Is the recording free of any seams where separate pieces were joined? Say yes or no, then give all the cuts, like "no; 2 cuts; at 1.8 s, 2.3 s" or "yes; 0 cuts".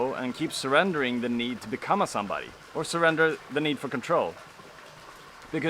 yes; 0 cuts